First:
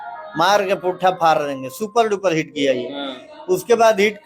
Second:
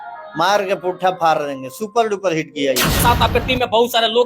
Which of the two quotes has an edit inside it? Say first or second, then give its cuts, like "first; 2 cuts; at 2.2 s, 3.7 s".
second; 1 cut; at 3.0 s